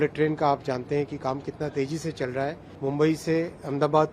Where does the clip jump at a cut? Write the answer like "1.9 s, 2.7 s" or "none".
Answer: 2.7 s